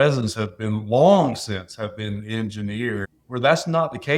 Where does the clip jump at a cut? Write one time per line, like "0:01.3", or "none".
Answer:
0:03.2